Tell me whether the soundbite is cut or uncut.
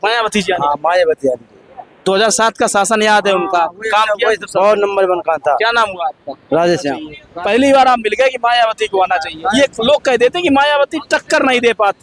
cut